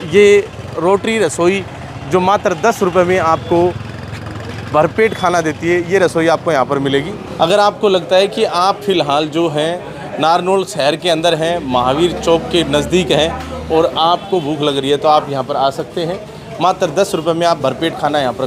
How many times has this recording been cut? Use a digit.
1